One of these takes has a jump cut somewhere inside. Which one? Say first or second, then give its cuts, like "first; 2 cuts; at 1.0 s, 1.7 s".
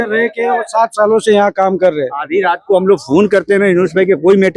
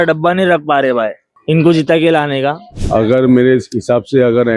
second; 2 cuts; at 1.3 s, 2.7 s